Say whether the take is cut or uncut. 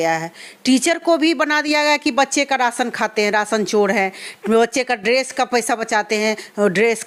uncut